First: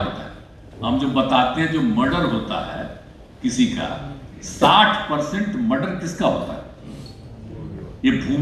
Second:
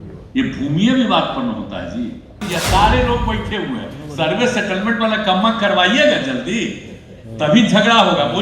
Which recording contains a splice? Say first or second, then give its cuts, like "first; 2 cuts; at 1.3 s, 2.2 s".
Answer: second; 1 cut; at 2.5 s